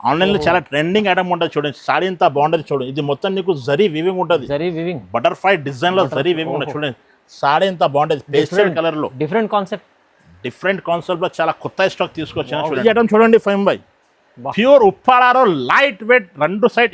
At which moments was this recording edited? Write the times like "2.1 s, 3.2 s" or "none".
12.8 s